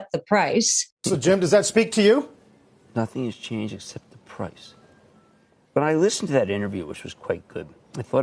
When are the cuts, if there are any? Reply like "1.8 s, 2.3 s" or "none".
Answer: none